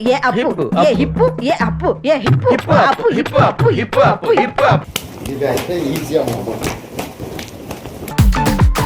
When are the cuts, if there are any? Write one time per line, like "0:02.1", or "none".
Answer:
0:04.9